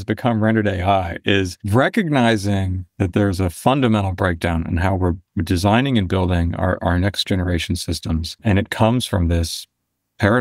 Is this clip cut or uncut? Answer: cut